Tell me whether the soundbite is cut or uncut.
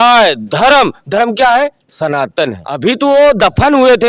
cut